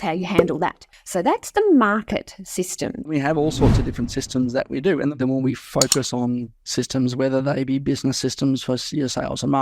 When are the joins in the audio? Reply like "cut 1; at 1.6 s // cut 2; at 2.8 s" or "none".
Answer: cut 1; at 3.1 s // cut 2; at 5.1 s